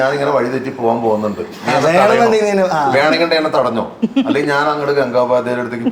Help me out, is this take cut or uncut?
uncut